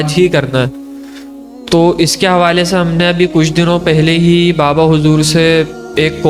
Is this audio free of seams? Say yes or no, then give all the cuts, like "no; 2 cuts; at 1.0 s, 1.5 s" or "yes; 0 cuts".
yes; 0 cuts